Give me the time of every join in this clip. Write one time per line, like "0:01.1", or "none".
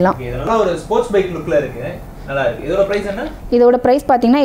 none